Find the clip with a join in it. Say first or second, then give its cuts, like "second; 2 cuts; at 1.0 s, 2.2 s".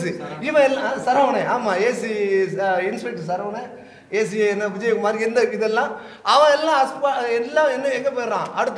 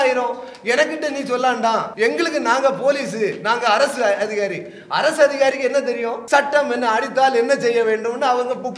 second; 2 cuts; at 1.9 s, 6.1 s